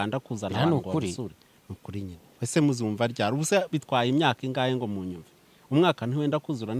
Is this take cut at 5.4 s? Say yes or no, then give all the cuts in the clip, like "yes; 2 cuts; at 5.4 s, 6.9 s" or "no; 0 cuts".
no; 1 cut; at 2.2 s